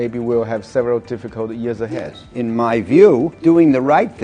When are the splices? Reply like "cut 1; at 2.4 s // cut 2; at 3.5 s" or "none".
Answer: cut 1; at 2.0 s // cut 2; at 3.3 s